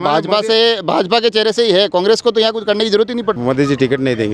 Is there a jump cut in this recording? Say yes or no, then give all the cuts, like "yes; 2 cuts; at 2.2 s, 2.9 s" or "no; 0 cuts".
yes; 1 cut; at 3.4 s